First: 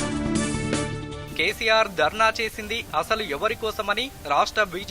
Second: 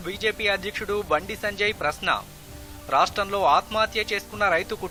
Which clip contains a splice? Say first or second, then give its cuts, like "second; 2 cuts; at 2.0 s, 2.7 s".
first; 1 cut; at 1.1 s